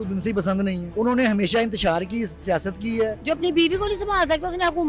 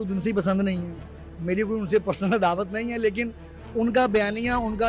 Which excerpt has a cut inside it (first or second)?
first